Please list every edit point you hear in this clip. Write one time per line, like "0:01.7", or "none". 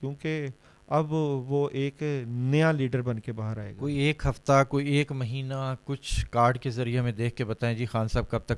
0:03.7